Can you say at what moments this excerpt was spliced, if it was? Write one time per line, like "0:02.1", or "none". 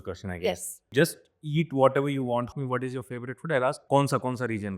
0:00.9
0:02.5
0:03.8